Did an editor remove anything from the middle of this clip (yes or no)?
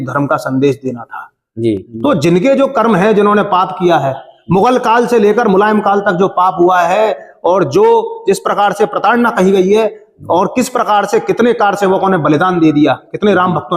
yes